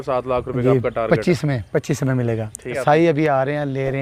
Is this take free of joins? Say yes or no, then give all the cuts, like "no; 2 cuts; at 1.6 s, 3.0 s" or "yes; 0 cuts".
no; 1 cut; at 2.8 s